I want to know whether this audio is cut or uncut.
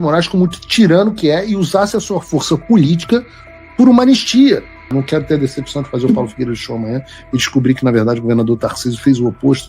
cut